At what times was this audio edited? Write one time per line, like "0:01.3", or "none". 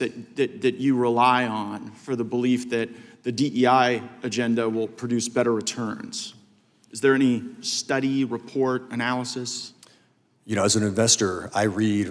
none